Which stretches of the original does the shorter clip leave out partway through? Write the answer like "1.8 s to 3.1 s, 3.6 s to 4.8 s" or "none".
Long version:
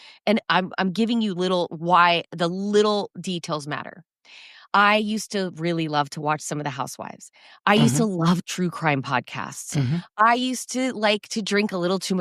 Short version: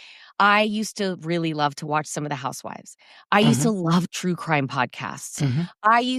none